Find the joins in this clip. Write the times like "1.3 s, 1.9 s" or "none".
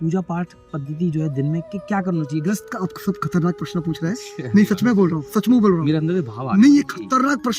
2.6 s